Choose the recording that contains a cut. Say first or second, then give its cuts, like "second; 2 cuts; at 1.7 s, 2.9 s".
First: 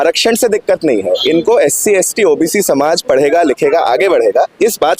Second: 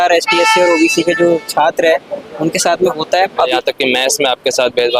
second; 1 cut; at 3.5 s